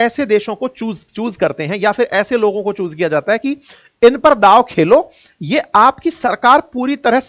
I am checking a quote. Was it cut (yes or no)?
no